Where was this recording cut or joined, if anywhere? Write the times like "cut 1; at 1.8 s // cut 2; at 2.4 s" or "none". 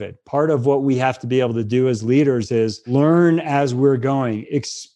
cut 1; at 2.9 s